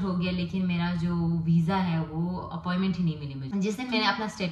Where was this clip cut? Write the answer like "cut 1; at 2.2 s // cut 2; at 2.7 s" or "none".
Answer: cut 1; at 3.3 s

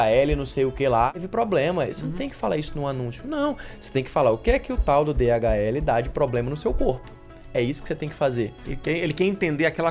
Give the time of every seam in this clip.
cut 1; at 1.1 s

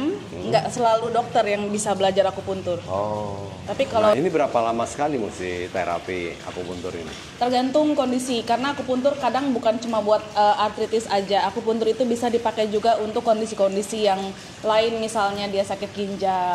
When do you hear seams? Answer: cut 1; at 4.1 s

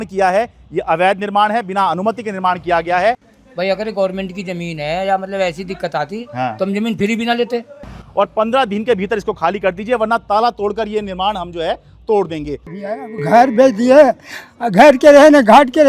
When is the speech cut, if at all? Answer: cut 1; at 3.3 s // cut 2; at 8.0 s // cut 3; at 13.0 s

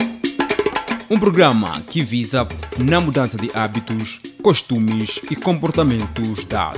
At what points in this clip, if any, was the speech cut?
none

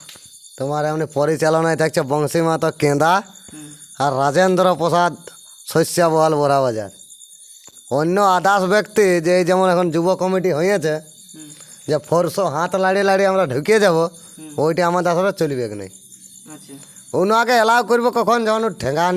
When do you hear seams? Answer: none

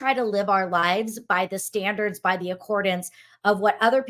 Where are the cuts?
none

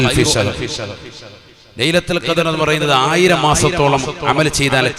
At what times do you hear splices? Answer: none

